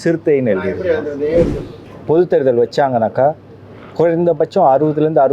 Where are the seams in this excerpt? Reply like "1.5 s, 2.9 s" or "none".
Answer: 1.6 s